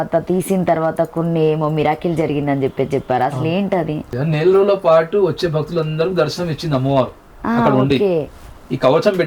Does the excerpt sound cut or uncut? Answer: cut